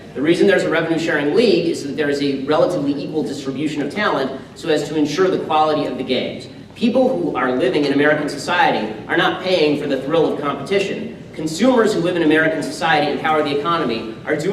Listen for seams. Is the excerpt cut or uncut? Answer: cut